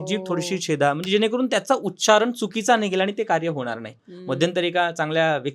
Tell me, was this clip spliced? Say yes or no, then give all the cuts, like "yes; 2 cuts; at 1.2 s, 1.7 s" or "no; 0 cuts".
no; 0 cuts